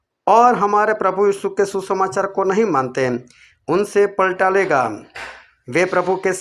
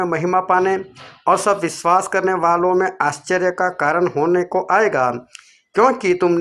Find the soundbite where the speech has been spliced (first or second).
first